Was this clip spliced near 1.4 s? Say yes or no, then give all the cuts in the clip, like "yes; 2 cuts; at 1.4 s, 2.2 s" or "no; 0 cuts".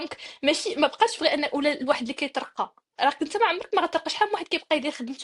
no; 0 cuts